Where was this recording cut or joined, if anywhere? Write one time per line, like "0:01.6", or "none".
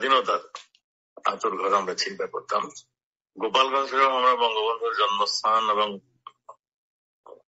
0:06.4